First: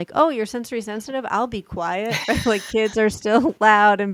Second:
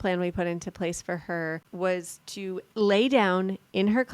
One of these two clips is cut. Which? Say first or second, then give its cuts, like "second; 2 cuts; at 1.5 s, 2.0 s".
second; 2 cuts; at 1.7 s, 2.7 s